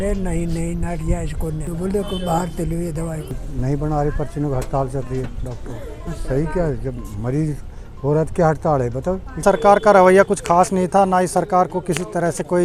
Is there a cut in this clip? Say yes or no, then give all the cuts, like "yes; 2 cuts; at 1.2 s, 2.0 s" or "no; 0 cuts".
yes; 4 cuts; at 1.7 s, 3.4 s, 6.1 s, 9.4 s